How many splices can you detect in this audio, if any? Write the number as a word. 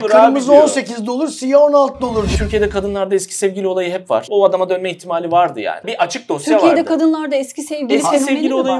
three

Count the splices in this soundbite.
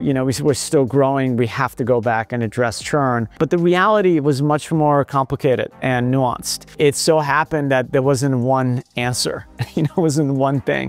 two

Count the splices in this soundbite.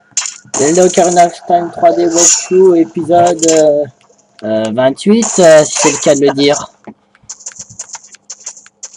zero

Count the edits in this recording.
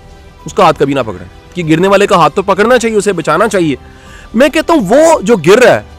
one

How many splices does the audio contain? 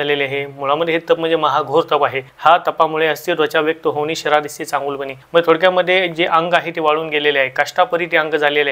two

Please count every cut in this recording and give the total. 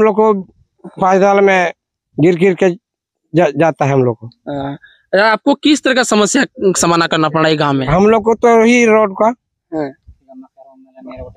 zero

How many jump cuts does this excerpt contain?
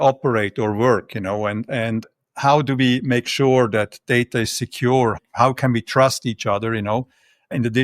one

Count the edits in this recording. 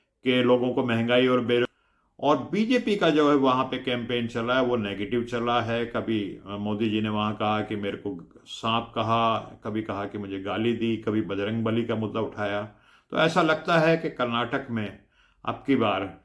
one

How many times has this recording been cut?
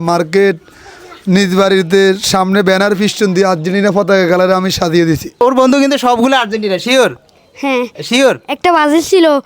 one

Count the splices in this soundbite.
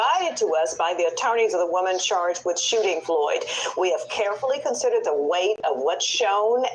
one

